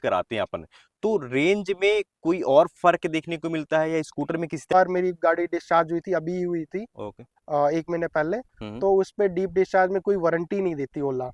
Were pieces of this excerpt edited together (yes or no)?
yes